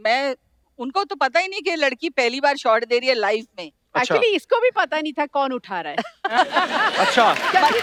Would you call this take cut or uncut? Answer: uncut